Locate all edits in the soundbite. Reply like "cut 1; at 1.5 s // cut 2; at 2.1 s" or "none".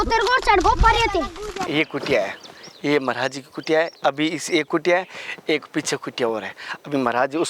cut 1; at 1.7 s